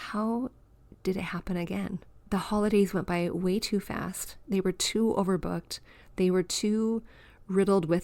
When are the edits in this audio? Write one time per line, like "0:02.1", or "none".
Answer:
none